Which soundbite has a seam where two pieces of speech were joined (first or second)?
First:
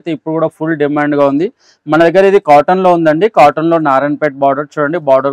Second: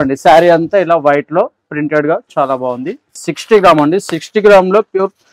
second